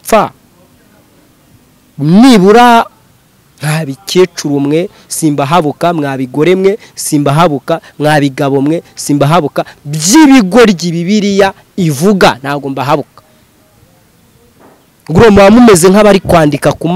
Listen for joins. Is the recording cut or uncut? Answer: cut